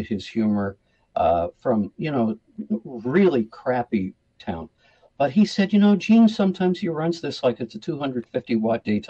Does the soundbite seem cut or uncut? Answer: uncut